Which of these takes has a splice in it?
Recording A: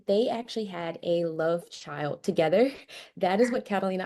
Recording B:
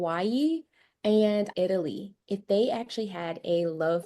B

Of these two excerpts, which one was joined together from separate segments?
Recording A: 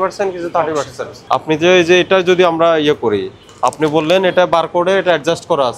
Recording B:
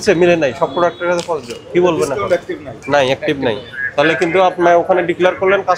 A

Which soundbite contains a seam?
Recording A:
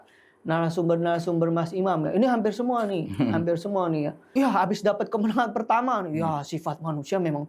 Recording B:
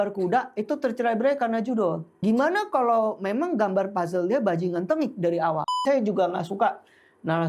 B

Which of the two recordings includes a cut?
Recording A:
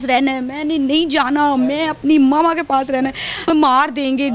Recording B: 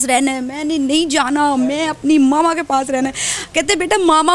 A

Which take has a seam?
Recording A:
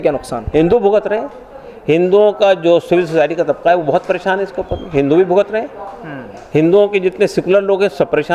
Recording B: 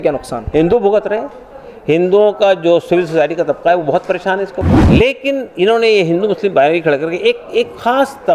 B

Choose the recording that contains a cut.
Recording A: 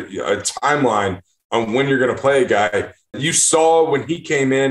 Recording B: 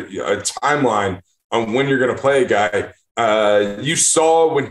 A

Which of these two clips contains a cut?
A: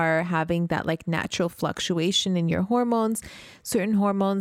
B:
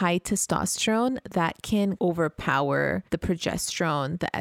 B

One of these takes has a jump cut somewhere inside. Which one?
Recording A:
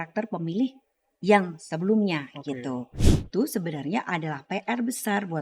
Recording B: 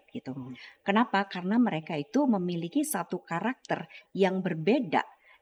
A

